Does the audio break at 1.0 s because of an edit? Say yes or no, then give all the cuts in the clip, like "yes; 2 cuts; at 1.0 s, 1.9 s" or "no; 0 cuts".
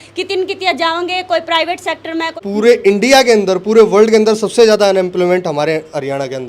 no; 1 cut; at 2.4 s